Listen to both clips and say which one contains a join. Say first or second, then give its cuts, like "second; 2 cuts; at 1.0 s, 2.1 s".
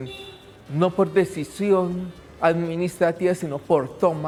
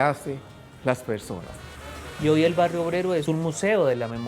second; 2 cuts; at 1.9 s, 3.2 s